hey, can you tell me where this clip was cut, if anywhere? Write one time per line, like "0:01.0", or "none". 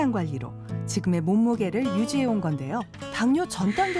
0:02.9